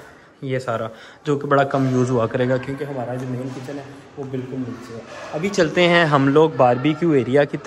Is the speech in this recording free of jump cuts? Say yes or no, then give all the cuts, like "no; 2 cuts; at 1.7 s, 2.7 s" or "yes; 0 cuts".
yes; 0 cuts